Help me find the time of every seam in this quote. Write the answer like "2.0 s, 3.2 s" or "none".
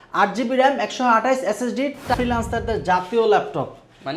2.1 s